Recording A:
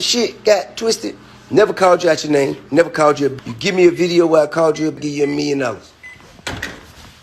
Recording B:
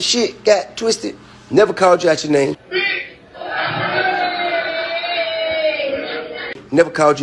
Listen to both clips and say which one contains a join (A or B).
A